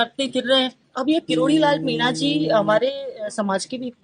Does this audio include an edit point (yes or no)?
yes